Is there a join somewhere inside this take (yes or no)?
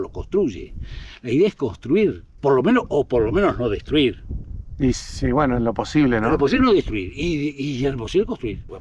no